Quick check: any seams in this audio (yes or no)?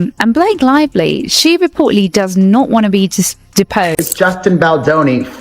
yes